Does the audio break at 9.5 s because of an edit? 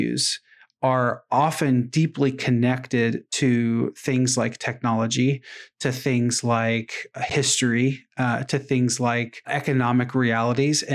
yes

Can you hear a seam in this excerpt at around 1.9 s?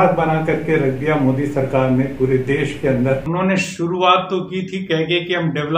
no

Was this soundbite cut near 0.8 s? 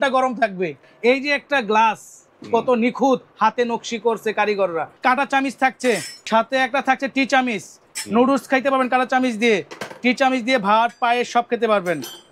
yes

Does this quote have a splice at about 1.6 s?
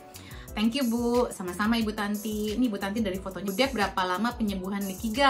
no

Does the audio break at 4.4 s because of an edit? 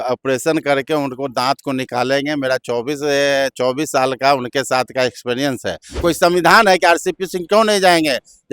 no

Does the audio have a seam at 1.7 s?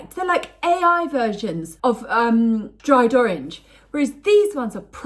yes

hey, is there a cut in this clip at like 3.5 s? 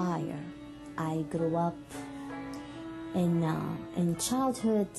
no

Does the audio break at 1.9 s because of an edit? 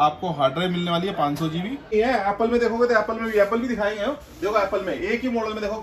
yes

